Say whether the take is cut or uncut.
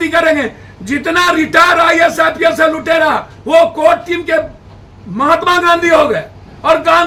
uncut